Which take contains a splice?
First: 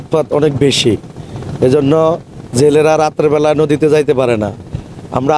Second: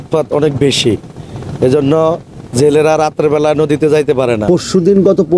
second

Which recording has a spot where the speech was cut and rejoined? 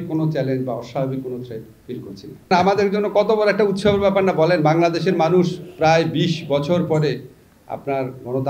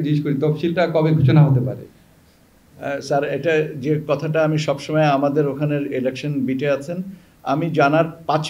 first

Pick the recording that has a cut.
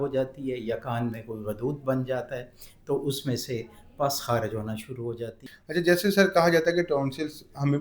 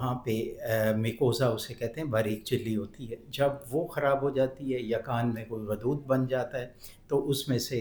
first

